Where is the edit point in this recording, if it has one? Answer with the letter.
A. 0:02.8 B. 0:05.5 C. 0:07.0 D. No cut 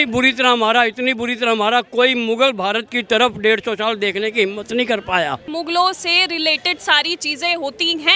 B